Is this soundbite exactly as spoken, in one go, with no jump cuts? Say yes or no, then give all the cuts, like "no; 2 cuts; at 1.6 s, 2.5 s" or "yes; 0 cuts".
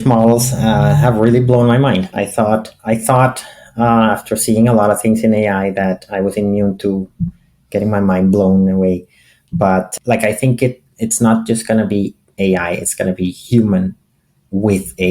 no; 1 cut; at 9.9 s